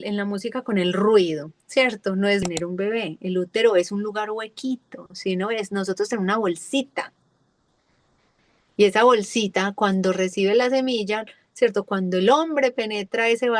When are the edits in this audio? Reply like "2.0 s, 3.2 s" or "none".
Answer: 2.4 s

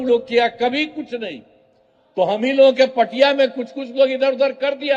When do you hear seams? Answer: none

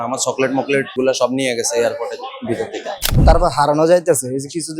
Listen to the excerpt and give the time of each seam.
1.0 s, 3.1 s

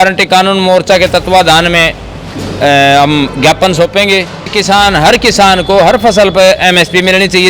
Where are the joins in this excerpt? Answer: 4.6 s

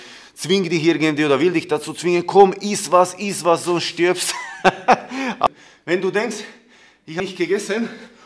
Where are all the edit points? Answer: 5.5 s, 7.2 s

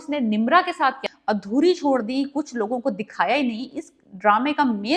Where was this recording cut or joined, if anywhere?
1.1 s

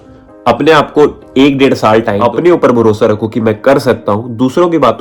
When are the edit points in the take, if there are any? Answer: 2.2 s

